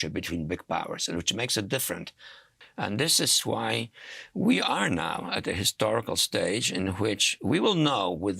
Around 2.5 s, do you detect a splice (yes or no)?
yes